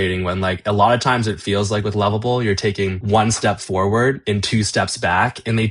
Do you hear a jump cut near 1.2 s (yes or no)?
no